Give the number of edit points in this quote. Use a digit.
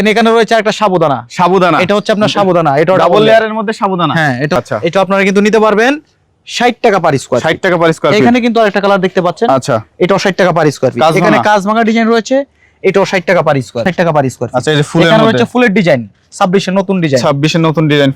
2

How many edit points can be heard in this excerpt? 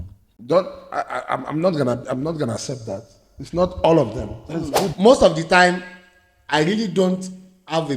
1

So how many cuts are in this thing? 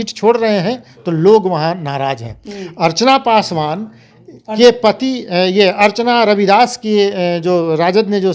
0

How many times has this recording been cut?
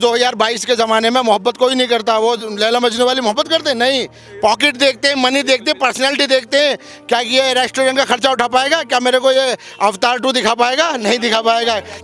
0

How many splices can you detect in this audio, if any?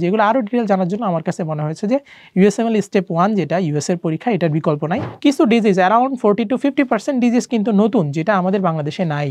1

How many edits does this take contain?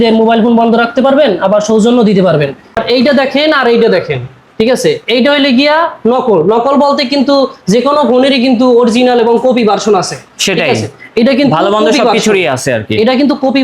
1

